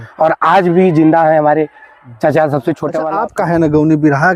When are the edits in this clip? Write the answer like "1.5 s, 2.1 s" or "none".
3.1 s